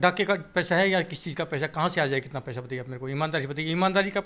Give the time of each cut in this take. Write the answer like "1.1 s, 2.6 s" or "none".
none